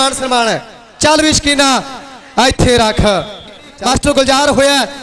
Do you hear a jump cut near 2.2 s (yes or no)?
no